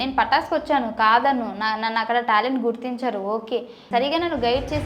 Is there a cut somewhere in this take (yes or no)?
yes